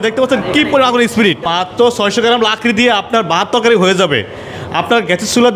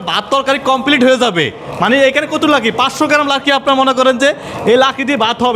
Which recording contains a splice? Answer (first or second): first